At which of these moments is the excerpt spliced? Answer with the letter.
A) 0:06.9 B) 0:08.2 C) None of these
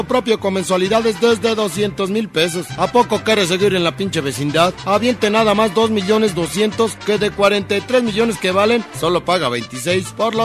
C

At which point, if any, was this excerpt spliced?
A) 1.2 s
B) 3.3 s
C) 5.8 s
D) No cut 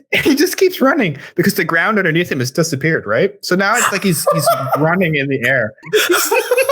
C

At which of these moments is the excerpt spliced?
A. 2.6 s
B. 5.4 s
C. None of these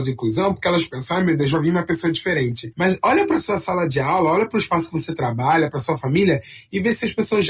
A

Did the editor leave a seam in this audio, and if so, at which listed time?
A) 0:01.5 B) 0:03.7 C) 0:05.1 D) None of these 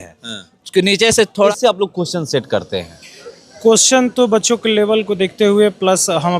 A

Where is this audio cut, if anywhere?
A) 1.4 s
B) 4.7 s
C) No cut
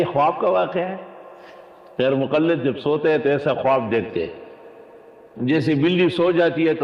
C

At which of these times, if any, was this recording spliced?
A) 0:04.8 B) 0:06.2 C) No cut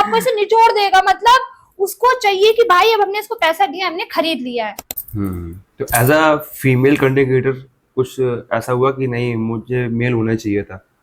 A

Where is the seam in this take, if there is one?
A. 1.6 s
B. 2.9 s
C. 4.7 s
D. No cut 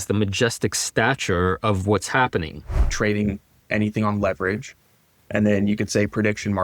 B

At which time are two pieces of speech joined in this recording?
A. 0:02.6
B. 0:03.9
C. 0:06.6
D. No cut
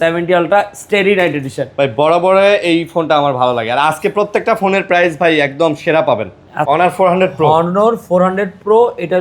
C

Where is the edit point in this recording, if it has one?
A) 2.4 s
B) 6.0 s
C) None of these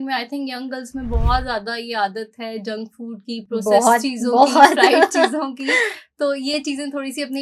C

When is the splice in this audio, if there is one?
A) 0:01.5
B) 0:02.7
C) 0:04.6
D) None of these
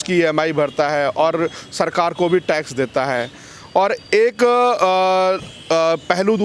D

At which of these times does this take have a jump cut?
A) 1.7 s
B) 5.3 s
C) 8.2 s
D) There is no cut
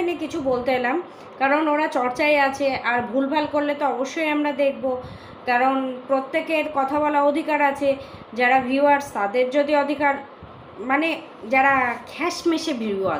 D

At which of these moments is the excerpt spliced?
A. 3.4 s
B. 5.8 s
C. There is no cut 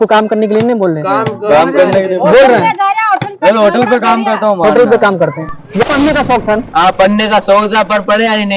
B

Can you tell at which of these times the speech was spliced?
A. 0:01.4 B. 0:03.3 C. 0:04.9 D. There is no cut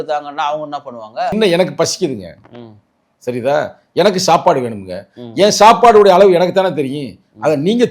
A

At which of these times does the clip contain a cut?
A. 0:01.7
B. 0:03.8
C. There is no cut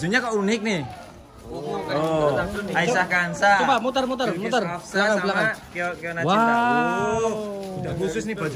C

